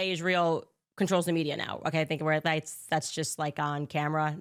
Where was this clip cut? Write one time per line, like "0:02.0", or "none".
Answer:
none